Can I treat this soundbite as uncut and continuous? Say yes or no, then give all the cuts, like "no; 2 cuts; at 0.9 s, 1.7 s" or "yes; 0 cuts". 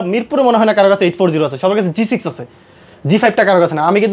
yes; 0 cuts